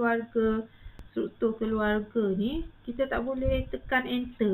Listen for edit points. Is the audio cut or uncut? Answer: cut